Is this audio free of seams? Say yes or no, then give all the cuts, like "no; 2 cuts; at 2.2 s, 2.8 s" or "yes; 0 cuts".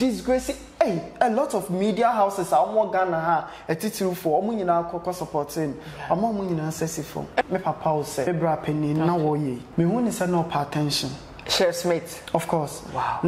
no; 3 cuts; at 7.4 s, 8.3 s, 9.6 s